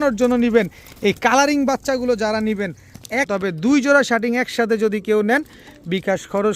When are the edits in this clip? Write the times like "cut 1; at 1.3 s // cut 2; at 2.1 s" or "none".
cut 1; at 3.3 s